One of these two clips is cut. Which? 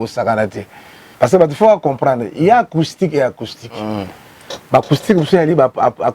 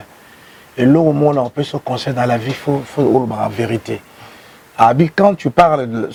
first; 1 cut; at 1.0 s

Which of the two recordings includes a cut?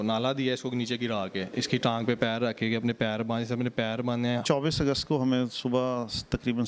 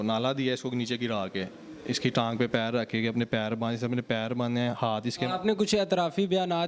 first; 2 cuts; at 1.5 s, 4.4 s

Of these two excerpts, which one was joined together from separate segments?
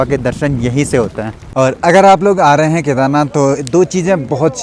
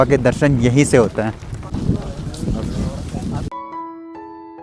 first; 1 cut; at 1.4 s

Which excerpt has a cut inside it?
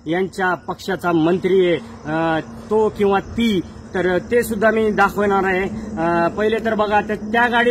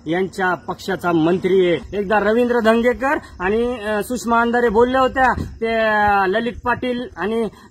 second; 1 cut; at 1.9 s

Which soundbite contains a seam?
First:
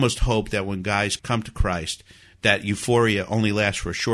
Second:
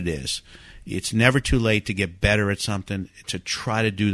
first; 1 cut; at 1.2 s

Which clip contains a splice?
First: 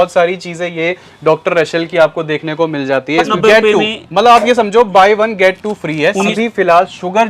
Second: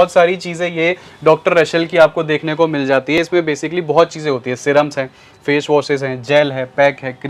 first; 2 cuts; at 3.3 s, 6.3 s

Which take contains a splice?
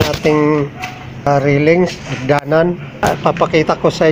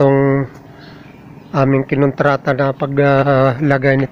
first; 2 cuts; at 1.2 s, 3.0 s

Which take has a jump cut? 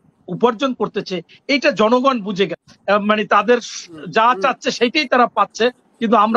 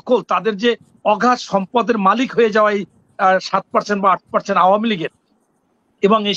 first; 1 cut; at 2.7 s

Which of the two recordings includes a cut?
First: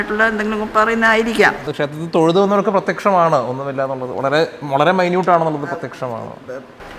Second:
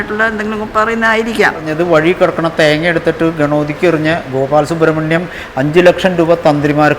second; 1 cut; at 1.7 s

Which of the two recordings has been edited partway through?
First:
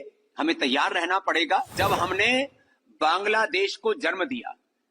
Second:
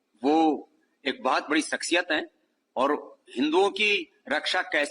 first; 1 cut; at 1.8 s

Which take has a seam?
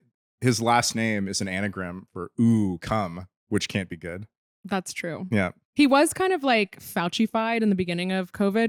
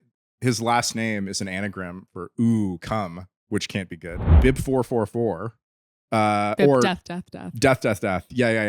second; 1 cut; at 4.4 s

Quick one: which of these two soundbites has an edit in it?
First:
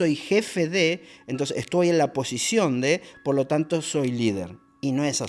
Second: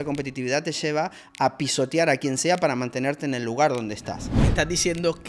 second; 1 cut; at 4.3 s

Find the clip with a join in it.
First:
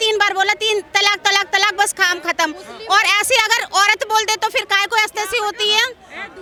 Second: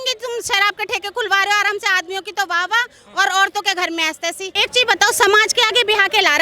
second; 1 cut; at 4.5 s

